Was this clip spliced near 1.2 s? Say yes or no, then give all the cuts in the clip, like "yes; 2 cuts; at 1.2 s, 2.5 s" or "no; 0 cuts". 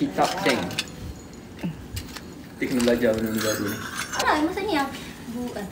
no; 1 cut; at 4.2 s